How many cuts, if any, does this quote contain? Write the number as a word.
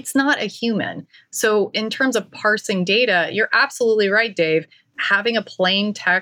one